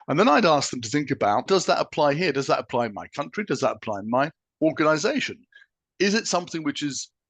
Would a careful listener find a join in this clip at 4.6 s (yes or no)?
no